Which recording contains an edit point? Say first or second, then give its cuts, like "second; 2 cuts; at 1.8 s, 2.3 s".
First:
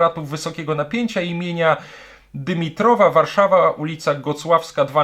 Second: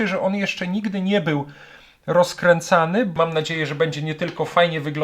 second; 1 cut; at 3.1 s